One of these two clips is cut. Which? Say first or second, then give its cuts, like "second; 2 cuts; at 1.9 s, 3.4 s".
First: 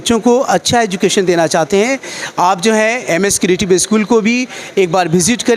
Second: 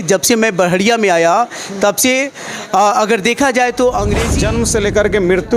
second; 1 cut; at 4.3 s